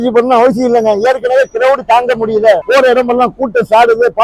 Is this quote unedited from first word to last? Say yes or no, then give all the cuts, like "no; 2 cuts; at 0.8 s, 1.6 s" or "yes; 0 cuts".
yes; 0 cuts